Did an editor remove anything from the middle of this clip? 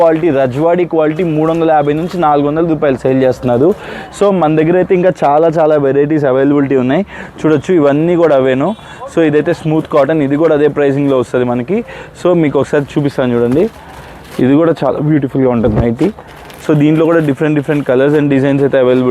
no; 0 cuts

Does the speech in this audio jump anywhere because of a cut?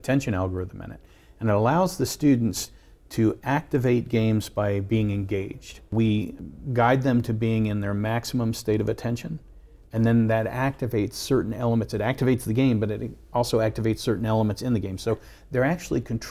yes; 2 cuts; at 5.9 s, 6.5 s

